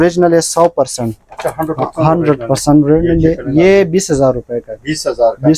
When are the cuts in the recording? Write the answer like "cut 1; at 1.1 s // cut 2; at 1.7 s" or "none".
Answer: none

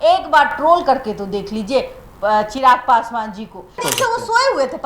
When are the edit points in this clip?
cut 1; at 3.8 s

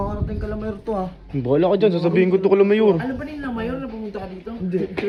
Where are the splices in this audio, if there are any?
none

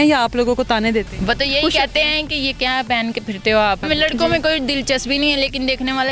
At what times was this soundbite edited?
cut 1; at 1.1 s // cut 2; at 3.8 s

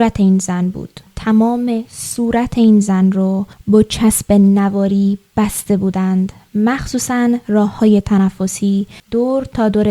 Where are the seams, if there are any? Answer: cut 1; at 1.0 s // cut 2; at 9.0 s

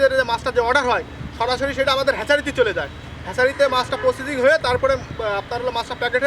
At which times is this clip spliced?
none

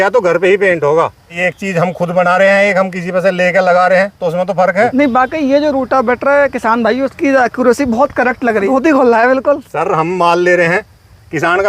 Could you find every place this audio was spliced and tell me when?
cut 1; at 1.4 s // cut 2; at 4.9 s // cut 3; at 8.7 s

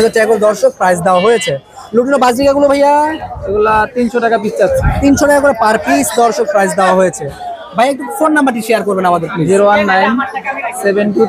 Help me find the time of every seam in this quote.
none

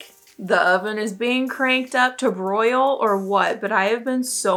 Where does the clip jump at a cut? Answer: none

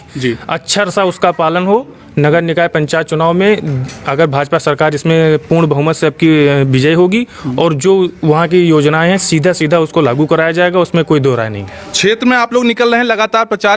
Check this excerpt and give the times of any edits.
none

